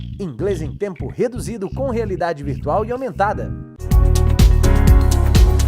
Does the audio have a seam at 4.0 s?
yes; 1 cut; at 4.0 s

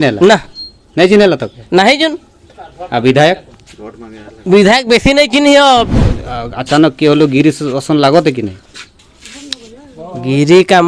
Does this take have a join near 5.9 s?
yes; 1 cut; at 5.9 s

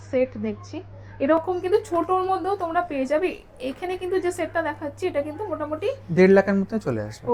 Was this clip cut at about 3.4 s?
no; 0 cuts

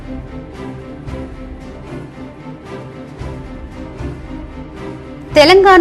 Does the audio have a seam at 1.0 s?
no; 1 cut; at 2.5 s

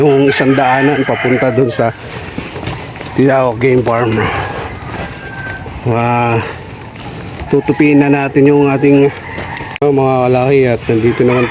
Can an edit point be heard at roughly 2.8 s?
no; 1 cut; at 9.8 s

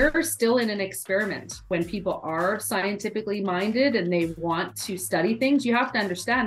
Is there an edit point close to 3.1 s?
no; 1 cut; at 1.6 s

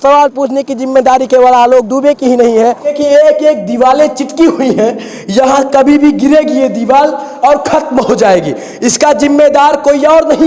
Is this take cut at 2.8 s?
yes; 1 cut; at 2.8 s

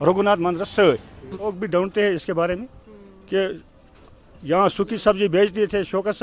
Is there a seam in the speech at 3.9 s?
no; 1 cut; at 1.5 s

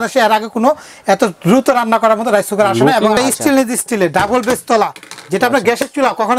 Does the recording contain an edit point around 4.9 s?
no; 1 cut; at 3.2 s

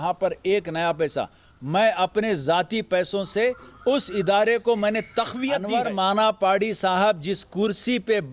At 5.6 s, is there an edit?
yes; 1 cut; at 5.6 s

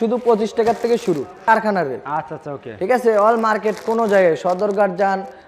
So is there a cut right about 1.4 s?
yes; 1 cut; at 1.4 s

